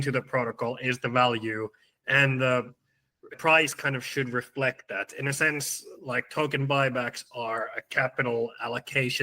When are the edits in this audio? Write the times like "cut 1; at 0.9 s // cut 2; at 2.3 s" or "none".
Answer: cut 1; at 2.0 s // cut 2; at 3.3 s